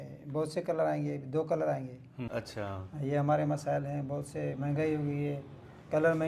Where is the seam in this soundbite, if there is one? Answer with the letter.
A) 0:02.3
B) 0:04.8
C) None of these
A